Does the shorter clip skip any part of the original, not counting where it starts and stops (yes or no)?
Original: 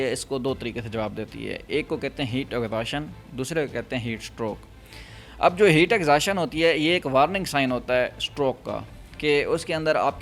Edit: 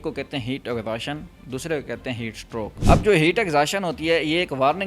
yes